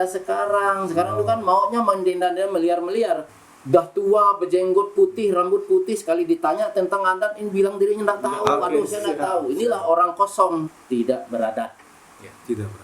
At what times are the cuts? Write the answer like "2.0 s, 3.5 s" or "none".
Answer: 3.4 s, 10.7 s

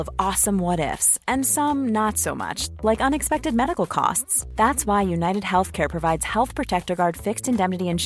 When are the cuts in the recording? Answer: none

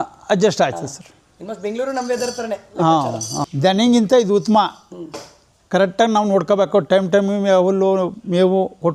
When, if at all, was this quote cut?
3.3 s

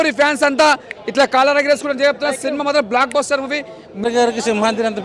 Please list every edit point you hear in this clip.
3.9 s

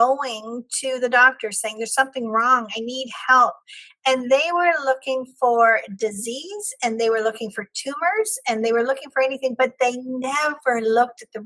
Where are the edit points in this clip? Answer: none

